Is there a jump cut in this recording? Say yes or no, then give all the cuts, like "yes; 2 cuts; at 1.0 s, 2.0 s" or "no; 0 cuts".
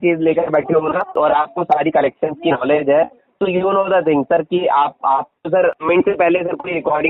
yes; 2 cuts; at 1.1 s, 5.8 s